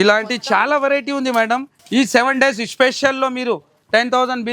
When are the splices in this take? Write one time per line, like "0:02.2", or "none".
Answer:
0:01.7